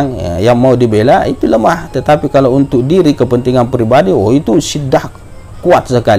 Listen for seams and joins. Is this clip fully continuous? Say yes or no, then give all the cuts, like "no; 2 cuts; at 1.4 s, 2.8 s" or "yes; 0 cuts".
yes; 0 cuts